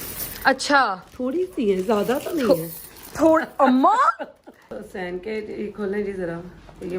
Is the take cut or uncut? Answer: cut